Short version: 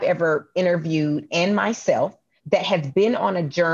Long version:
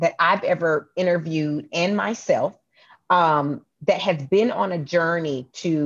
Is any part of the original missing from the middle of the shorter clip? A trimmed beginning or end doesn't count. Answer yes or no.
yes